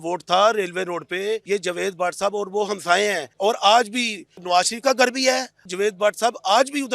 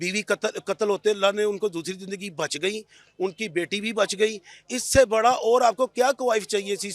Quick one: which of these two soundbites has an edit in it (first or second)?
first